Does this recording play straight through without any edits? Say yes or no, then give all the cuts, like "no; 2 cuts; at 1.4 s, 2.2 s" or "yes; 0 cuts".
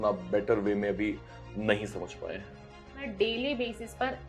no; 1 cut; at 3.1 s